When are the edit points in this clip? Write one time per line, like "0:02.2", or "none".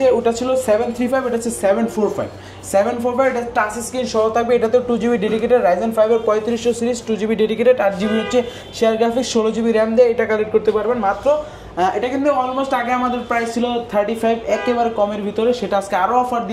none

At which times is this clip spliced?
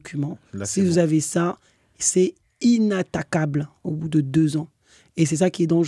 none

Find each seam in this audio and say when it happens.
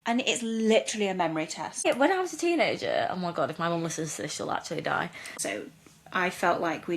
0:01.8
0:05.2

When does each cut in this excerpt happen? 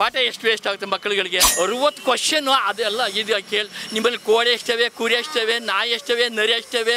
0:01.4

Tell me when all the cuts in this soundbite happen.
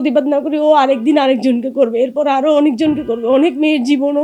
none

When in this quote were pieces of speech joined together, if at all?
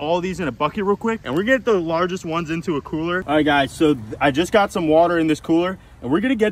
none

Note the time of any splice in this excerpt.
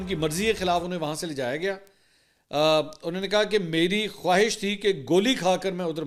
none

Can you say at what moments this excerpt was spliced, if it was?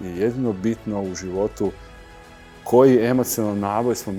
none

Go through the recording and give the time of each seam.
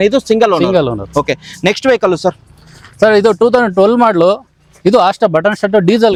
none

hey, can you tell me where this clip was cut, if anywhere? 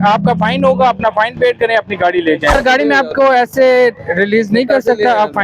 0:02.5

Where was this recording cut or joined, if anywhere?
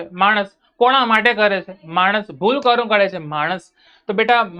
none

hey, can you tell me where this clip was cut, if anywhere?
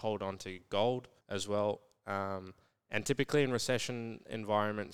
0:01.2

